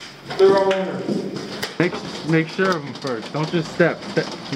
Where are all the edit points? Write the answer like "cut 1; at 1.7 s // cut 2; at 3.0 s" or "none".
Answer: cut 1; at 1.8 s